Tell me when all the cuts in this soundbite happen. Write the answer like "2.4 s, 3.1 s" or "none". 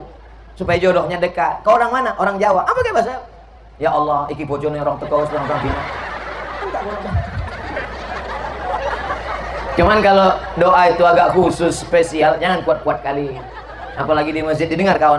none